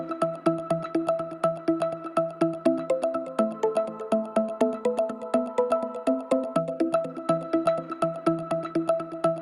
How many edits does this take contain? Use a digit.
1